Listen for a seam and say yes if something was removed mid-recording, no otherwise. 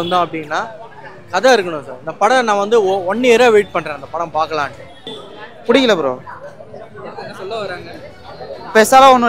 yes